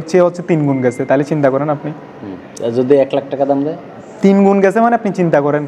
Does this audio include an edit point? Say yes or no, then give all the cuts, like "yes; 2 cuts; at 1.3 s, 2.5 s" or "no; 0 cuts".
no; 0 cuts